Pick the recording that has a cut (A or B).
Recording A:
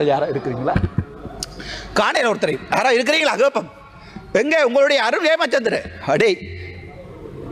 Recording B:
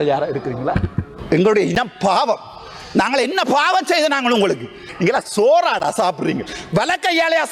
B